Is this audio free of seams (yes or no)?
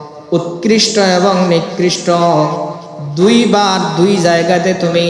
yes